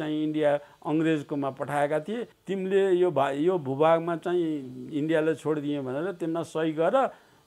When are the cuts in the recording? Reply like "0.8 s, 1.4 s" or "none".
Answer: 2.3 s